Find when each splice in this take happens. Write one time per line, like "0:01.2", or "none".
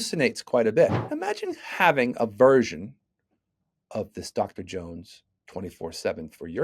0:01.1